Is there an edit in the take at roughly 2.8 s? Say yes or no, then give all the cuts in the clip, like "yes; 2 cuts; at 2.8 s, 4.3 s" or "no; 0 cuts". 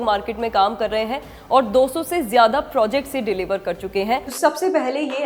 no; 1 cut; at 4.3 s